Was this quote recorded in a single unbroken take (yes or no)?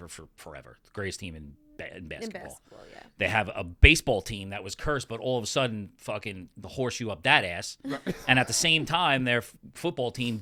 yes